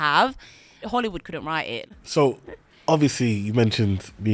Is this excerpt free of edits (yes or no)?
no